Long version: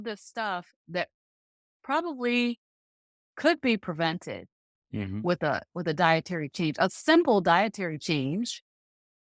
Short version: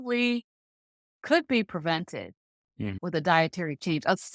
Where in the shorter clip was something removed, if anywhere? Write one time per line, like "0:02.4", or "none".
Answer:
0:03.0